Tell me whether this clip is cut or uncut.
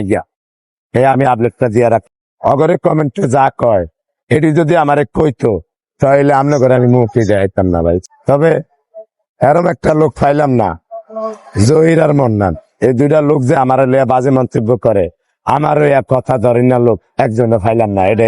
cut